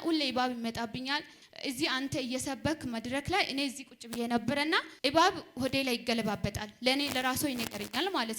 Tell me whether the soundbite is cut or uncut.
cut